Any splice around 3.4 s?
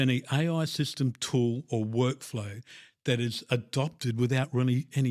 yes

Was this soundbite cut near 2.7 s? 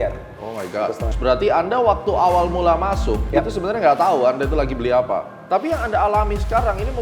no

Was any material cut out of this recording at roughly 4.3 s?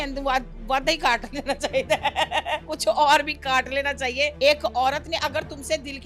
yes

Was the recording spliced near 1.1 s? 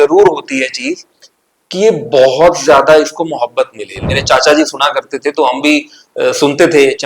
no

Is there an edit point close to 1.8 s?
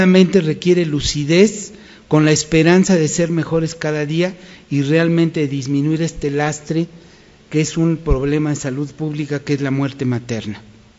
no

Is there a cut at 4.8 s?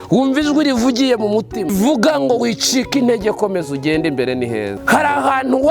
yes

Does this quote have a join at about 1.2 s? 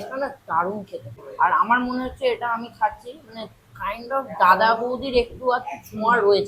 yes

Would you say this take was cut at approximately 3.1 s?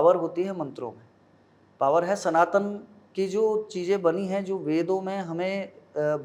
no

